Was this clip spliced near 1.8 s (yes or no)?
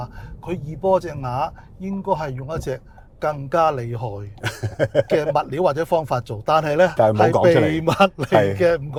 no